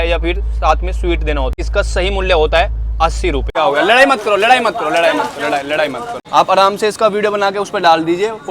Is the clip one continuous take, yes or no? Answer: no